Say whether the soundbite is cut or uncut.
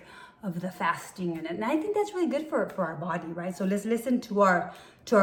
uncut